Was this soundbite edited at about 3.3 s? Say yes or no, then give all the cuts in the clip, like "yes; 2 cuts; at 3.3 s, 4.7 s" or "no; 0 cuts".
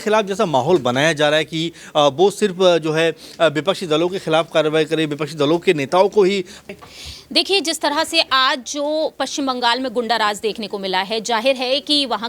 no; 1 cut; at 6.6 s